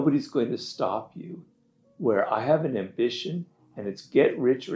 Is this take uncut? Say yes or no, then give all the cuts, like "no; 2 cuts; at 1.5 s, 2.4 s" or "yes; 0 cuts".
yes; 0 cuts